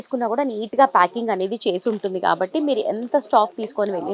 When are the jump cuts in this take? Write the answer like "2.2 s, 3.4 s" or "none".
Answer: none